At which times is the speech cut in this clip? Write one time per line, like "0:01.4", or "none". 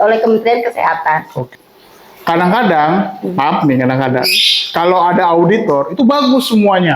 0:01.5